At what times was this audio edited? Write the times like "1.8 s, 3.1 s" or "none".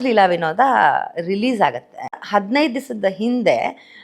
2.2 s